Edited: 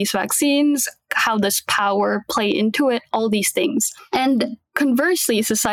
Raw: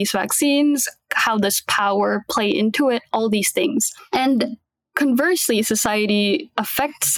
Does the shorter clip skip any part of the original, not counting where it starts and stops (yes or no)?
yes